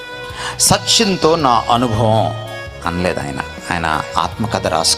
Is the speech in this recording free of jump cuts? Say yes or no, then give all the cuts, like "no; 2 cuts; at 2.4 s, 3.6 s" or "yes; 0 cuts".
yes; 0 cuts